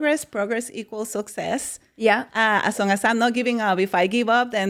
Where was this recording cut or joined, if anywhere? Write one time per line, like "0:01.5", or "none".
none